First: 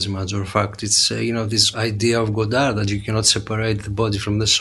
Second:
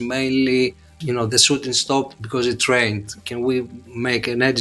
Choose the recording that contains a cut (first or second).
first